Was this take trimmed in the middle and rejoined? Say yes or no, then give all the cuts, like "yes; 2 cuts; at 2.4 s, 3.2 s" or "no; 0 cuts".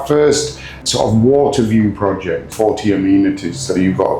yes; 2 cuts; at 0.8 s, 2.5 s